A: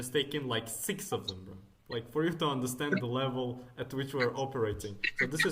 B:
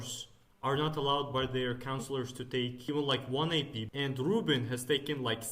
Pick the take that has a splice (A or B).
B